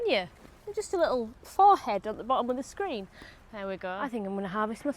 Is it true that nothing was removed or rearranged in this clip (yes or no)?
no